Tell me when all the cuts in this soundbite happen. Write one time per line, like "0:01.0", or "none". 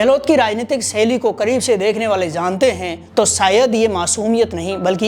0:03.0